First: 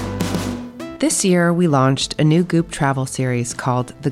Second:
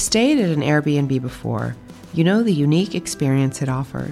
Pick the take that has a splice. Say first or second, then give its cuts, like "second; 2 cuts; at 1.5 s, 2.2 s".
first; 1 cut; at 0.9 s